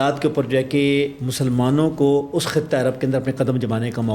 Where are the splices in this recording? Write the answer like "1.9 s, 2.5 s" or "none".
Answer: none